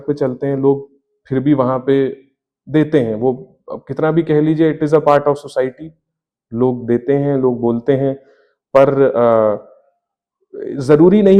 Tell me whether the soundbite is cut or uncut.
uncut